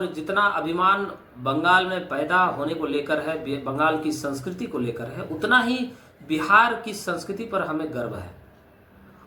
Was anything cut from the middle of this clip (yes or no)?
no